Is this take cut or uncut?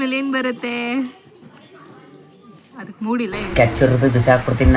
cut